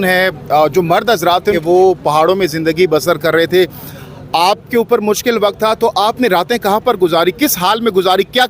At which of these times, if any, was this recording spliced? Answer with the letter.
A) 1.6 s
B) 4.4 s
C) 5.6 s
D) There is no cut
A